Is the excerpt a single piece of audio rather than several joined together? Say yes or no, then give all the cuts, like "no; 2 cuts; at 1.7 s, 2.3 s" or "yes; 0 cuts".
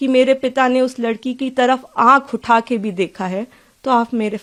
yes; 0 cuts